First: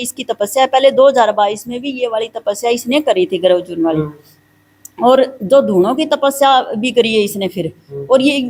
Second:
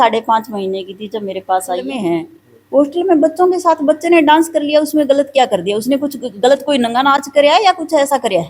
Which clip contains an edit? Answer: second; 1 cut; at 1.9 s

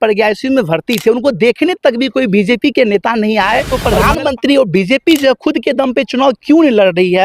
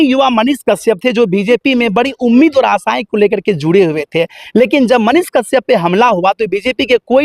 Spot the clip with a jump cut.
first; 1 cut; at 3.6 s

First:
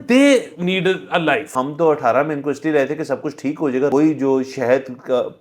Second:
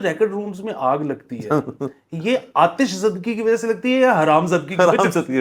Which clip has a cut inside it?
first; 2 cuts; at 1.5 s, 3.9 s

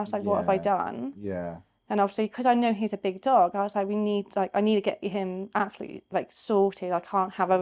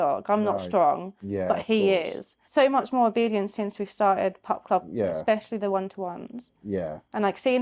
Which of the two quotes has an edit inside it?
second; 1 cut; at 2.4 s

